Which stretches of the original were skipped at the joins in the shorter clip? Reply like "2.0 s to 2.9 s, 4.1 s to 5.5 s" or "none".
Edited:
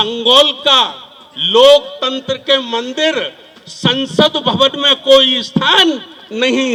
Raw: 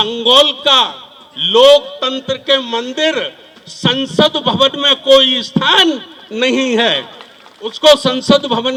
none